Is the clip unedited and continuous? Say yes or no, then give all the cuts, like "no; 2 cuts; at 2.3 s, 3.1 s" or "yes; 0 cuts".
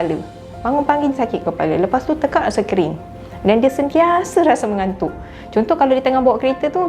yes; 0 cuts